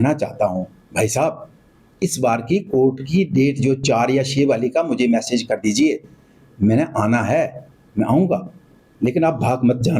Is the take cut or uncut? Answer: uncut